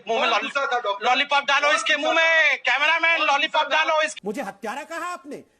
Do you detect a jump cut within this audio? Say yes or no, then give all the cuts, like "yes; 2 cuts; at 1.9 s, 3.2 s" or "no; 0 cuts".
yes; 2 cuts; at 3.7 s, 4.2 s